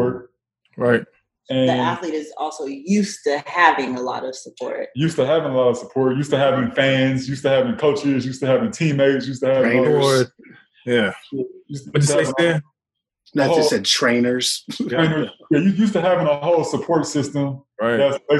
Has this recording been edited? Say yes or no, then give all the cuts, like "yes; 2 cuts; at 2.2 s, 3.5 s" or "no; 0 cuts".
no; 0 cuts